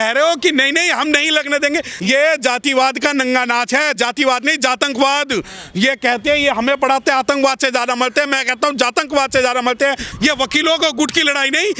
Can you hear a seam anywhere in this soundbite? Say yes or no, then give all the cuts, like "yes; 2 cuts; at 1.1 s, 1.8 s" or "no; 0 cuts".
yes; 2 cuts; at 1.9 s, 10.1 s